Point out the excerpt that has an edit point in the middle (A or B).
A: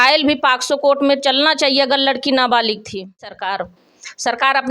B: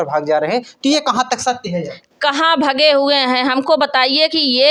A